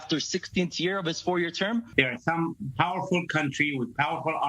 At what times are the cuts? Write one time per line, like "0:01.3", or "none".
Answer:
0:01.9